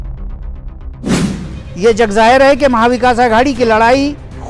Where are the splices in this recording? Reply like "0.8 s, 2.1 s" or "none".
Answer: 1.1 s